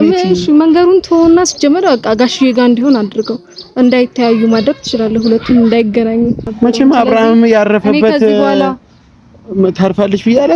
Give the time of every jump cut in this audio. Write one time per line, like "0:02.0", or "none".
0:06.5